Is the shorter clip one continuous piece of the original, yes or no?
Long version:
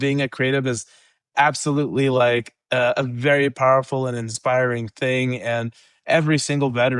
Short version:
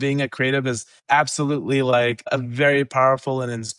no